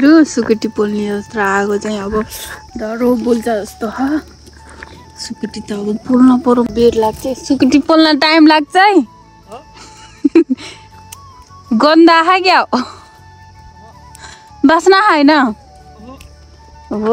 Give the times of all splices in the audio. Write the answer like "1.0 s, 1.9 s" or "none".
6.7 s